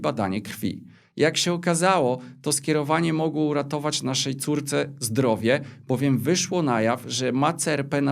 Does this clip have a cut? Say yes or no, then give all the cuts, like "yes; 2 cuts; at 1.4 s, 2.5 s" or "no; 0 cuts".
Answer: no; 0 cuts